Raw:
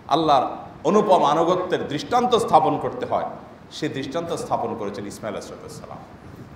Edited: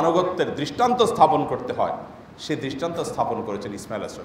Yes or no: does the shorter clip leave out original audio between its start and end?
no